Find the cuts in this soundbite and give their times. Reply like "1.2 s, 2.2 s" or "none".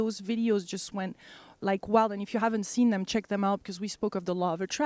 1.9 s